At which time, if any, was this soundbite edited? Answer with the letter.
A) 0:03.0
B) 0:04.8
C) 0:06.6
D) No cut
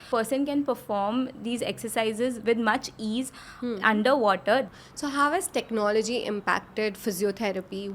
B